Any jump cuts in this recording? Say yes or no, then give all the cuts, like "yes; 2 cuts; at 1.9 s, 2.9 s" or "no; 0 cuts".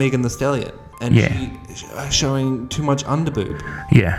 no; 0 cuts